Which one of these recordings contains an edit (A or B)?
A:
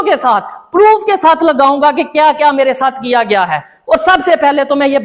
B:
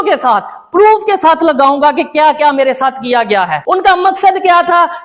B